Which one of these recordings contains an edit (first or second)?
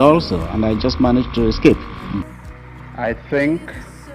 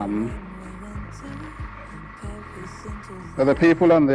first